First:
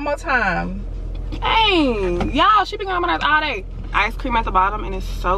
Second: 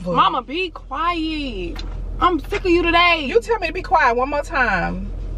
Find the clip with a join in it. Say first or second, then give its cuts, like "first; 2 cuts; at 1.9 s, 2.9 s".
first; 1 cut; at 3.9 s